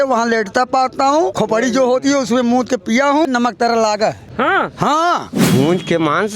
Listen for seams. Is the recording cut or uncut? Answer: cut